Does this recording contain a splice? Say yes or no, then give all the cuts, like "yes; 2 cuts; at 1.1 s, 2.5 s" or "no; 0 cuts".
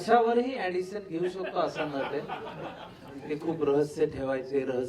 yes; 1 cut; at 3.2 s